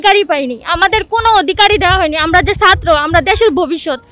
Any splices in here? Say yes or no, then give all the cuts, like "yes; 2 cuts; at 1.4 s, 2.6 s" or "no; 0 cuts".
no; 0 cuts